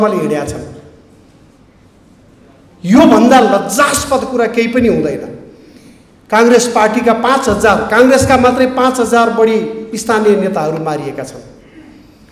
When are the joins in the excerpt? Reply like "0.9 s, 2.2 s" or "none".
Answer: none

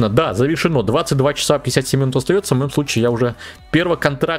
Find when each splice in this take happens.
none

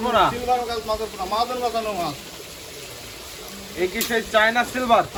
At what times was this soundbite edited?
none

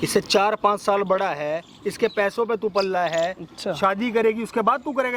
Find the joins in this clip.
none

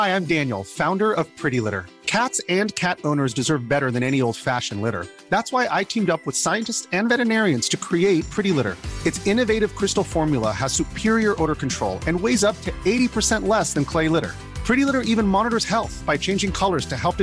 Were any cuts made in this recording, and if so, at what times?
none

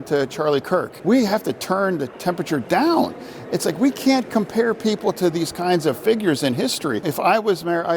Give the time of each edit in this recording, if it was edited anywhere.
0.9 s, 7.1 s

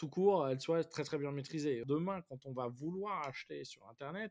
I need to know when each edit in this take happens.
1.8 s

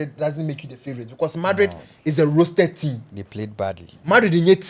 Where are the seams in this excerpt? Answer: none

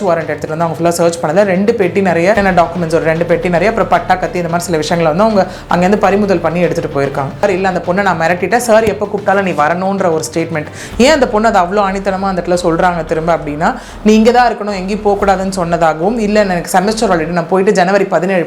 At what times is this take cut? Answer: 2.4 s, 7.4 s

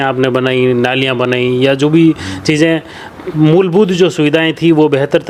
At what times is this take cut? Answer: none

